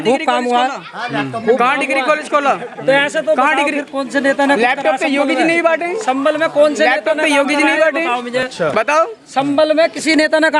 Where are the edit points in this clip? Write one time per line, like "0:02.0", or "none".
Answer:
none